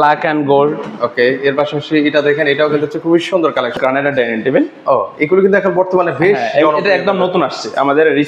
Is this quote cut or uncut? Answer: cut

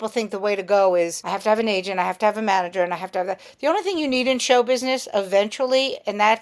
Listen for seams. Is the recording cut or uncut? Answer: cut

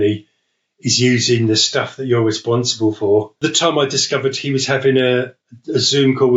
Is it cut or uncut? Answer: cut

